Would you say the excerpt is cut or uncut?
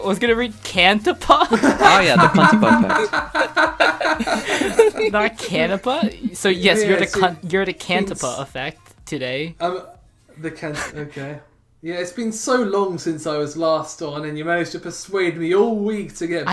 uncut